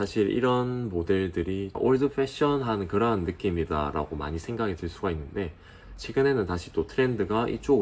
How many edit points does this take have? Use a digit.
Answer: 1